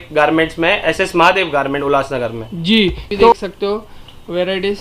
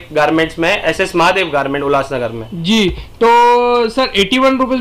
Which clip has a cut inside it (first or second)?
first